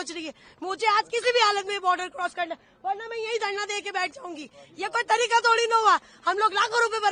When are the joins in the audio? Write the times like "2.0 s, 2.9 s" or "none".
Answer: none